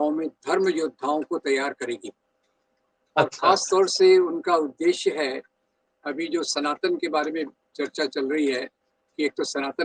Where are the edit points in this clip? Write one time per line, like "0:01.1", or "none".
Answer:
none